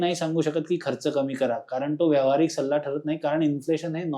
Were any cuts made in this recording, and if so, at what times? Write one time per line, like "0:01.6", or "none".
none